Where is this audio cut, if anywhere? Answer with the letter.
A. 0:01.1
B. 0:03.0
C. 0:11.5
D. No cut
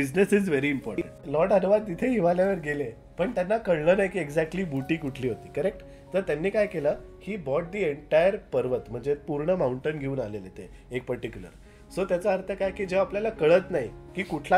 A